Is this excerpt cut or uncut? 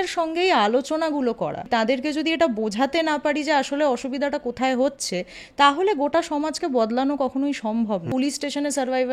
cut